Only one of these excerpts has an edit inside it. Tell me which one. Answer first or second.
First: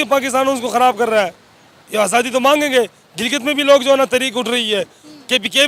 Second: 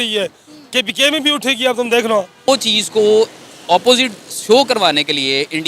second